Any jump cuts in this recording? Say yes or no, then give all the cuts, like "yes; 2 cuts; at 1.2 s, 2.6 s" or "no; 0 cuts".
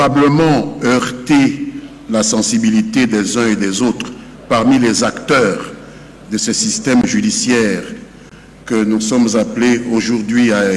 no; 0 cuts